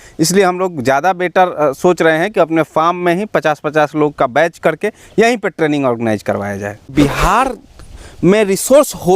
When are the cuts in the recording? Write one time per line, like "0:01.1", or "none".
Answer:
0:06.9